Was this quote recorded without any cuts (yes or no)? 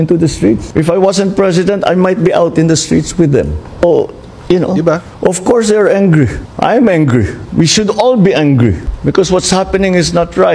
yes